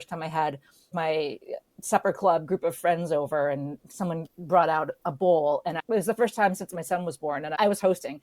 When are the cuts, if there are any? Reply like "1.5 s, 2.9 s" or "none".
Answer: 0.9 s, 4.3 s